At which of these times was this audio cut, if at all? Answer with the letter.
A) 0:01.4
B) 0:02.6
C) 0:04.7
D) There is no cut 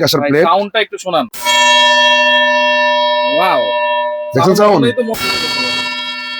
A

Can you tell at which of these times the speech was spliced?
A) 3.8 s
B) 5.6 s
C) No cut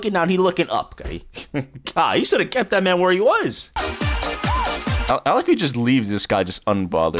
A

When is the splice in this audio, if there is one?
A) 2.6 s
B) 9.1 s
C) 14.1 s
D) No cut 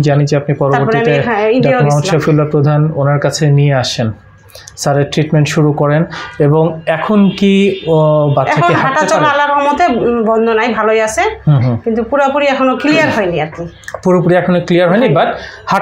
D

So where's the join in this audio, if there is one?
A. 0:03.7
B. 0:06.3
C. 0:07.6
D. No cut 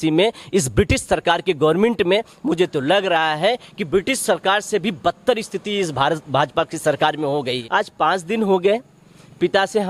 C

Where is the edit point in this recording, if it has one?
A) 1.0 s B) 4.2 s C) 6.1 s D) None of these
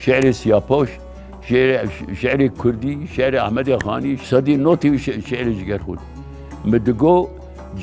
B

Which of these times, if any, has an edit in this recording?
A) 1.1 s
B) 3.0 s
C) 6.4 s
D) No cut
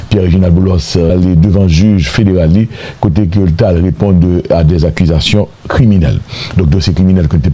A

